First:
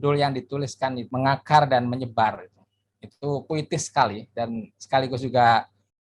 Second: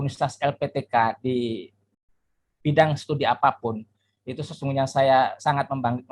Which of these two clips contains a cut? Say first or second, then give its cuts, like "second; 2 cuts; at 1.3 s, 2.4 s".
first; 1 cut; at 1.0 s